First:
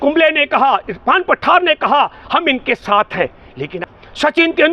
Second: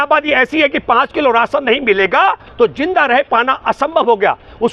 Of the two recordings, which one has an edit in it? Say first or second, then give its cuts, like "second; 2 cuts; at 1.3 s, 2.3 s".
first; 1 cut; at 3.6 s